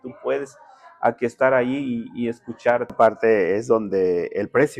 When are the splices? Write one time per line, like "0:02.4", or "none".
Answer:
0:02.9